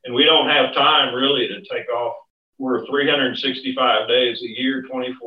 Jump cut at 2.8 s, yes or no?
yes